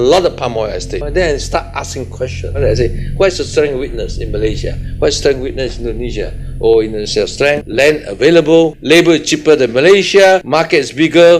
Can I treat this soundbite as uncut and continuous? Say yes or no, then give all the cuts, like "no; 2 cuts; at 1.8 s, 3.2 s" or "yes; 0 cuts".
no; 1 cut; at 2.6 s